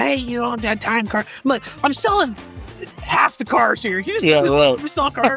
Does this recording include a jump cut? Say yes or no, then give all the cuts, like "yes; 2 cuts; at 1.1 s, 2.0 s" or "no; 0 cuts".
no; 0 cuts